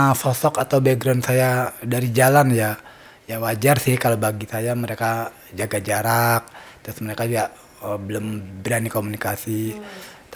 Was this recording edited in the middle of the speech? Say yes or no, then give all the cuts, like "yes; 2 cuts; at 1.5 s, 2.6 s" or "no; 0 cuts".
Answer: no; 0 cuts